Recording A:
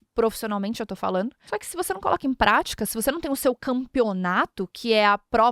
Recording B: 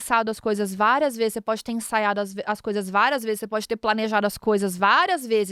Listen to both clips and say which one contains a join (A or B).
A